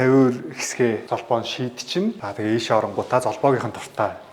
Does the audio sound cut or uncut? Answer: uncut